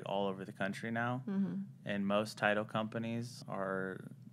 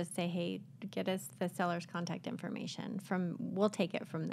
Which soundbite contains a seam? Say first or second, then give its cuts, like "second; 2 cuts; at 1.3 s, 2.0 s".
first; 1 cut; at 3.4 s